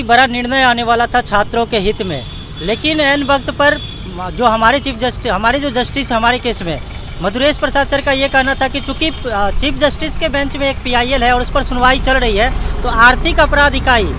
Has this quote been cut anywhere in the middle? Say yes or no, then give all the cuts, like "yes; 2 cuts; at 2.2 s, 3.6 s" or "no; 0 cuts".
no; 0 cuts